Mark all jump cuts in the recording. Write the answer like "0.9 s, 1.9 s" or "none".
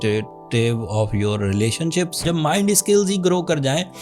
2.2 s

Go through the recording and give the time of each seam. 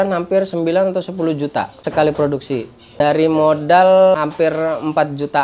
1.8 s, 3.0 s, 4.1 s

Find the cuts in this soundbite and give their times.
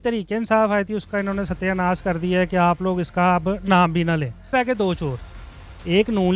4.5 s

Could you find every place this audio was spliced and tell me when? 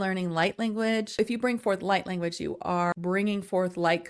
1.2 s, 2.9 s

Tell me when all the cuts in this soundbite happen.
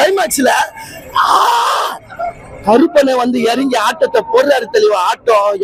none

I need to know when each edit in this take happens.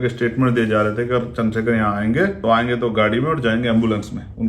2.4 s

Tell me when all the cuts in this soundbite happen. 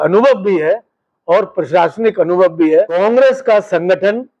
3.0 s

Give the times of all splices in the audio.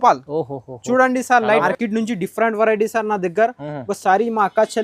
1.6 s

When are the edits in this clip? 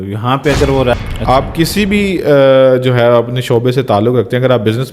1.0 s

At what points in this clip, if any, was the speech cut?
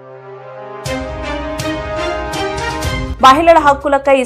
none

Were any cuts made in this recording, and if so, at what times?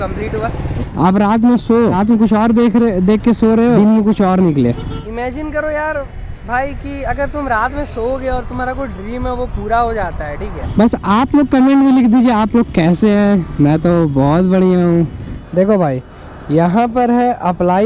0.9 s, 2.0 s, 3.8 s, 5.0 s, 10.6 s, 15.3 s

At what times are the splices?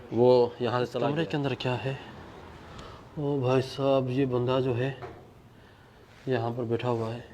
1.0 s

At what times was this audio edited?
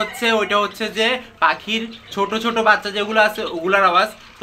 none

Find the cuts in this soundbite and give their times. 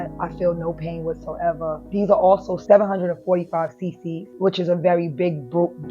1.8 s, 2.6 s, 4.3 s

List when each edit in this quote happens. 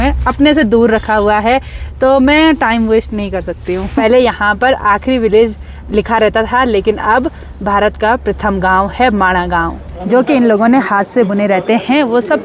3.9 s, 9.9 s

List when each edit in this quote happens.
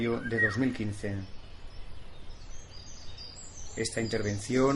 3.7 s

